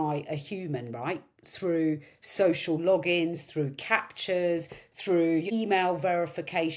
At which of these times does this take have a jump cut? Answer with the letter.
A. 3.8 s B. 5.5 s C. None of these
B